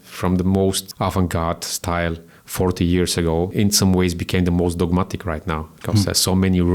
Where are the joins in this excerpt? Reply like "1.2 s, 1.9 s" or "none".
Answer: 0.9 s, 3.5 s